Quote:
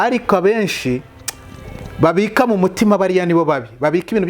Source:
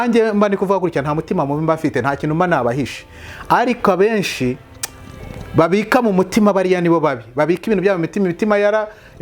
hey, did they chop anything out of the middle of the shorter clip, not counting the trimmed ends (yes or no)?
no